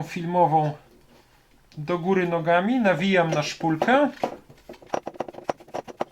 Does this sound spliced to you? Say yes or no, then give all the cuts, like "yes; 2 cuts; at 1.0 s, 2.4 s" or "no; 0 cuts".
no; 0 cuts